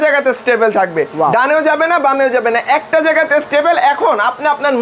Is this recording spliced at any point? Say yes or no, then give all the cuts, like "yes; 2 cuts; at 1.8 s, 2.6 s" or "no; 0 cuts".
no; 0 cuts